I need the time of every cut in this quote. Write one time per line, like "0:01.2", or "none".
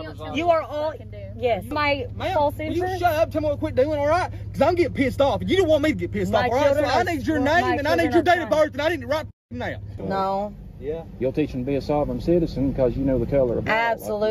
0:01.7
0:09.9